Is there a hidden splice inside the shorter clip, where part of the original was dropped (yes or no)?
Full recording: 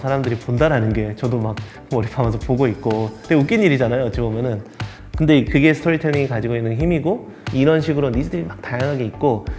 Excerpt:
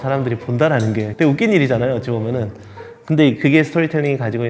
yes